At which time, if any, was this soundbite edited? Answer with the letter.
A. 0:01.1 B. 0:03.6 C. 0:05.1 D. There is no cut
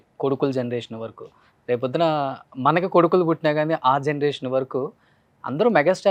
D